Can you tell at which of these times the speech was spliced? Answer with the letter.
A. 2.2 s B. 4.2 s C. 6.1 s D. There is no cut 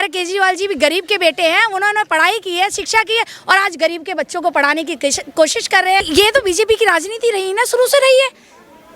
C